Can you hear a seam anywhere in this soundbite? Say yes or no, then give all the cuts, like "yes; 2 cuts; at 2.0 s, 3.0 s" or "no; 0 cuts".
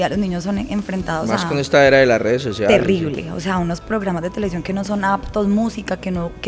no; 0 cuts